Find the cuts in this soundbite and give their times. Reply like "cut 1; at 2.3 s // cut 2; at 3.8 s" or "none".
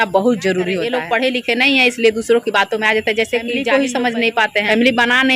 cut 1; at 1.0 s // cut 2; at 3.6 s